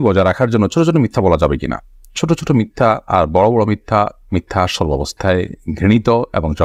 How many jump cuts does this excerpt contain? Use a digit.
0